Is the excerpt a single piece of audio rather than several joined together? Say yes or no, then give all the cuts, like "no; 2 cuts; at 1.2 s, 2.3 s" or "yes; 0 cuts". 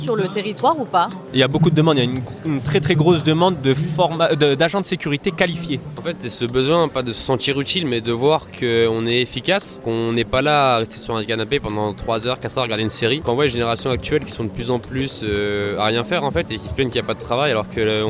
no; 4 cuts; at 1.2 s, 5.9 s, 9.8 s, 13.2 s